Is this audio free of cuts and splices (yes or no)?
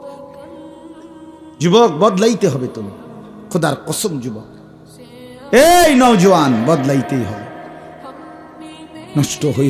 no